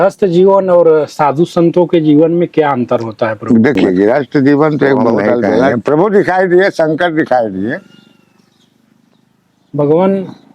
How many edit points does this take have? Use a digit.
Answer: 1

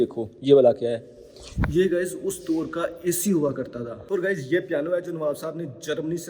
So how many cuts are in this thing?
1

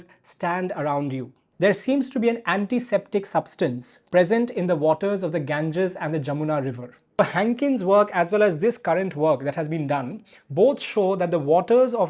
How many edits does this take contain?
2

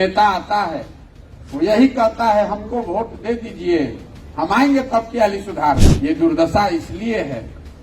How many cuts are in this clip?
1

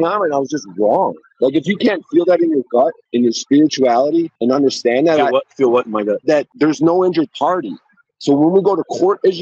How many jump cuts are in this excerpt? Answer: 3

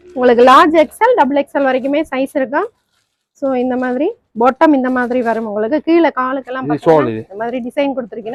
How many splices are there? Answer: 0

